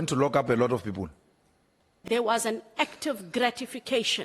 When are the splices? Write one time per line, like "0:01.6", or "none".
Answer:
0:02.0